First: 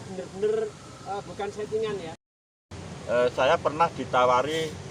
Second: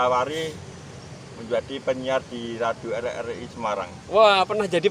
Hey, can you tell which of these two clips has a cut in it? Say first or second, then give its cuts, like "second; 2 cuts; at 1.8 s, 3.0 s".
first; 1 cut; at 2.2 s